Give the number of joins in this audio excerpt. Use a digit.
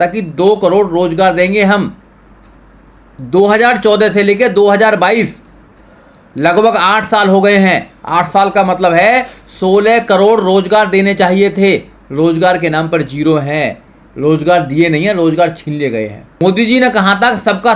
1